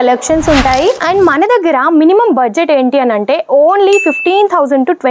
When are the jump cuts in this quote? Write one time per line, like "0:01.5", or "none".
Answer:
0:01.0